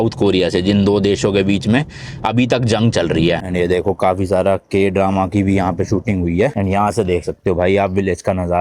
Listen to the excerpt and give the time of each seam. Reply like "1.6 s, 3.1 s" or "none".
3.5 s, 6.5 s